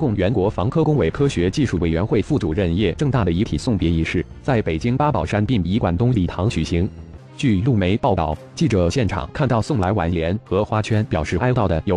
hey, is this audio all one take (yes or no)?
yes